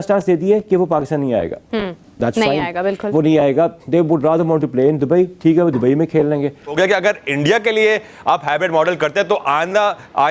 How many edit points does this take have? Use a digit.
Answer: 1